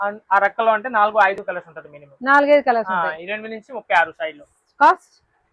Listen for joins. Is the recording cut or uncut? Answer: uncut